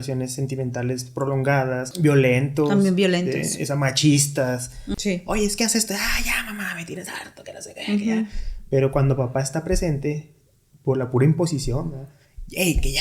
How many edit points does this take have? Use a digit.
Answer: 2